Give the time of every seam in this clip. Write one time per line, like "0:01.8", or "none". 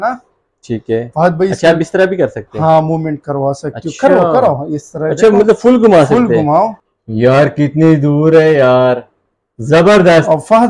0:06.8